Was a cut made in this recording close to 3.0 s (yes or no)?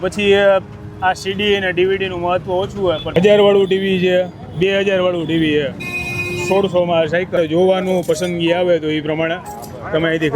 yes